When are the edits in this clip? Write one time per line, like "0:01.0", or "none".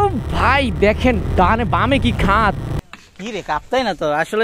0:02.9